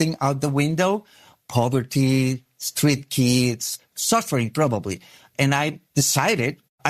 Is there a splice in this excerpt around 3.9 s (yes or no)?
yes